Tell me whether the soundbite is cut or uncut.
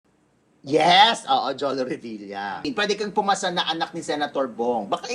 cut